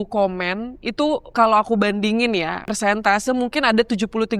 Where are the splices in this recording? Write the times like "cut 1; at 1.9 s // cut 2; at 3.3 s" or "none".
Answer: cut 1; at 1.3 s // cut 2; at 2.7 s